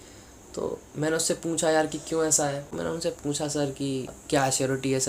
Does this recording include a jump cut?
yes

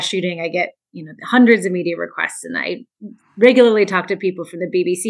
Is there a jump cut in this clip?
no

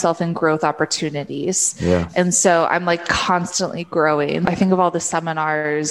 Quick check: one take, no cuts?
no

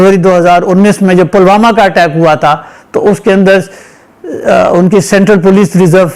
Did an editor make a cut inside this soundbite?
no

